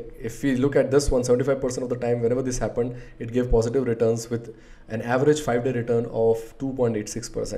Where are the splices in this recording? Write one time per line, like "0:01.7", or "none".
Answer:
none